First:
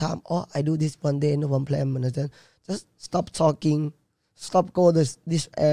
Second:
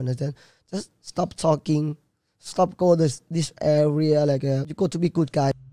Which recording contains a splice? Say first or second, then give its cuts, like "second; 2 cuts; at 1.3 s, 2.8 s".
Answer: second; 1 cut; at 4.7 s